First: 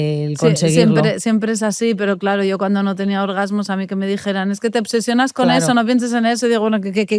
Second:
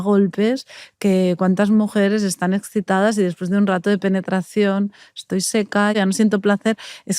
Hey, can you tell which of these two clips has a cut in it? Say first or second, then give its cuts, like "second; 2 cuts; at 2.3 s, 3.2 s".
second; 1 cut; at 6.0 s